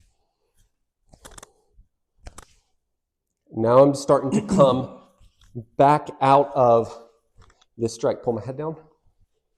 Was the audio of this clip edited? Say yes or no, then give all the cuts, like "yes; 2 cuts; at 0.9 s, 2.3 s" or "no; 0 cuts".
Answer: no; 0 cuts